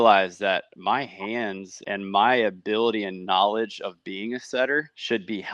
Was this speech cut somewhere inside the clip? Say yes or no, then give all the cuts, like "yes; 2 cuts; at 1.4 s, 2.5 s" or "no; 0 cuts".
no; 0 cuts